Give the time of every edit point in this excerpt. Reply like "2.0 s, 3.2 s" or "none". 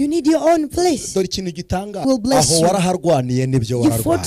2.0 s